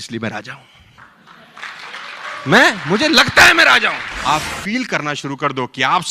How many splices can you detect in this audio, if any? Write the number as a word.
one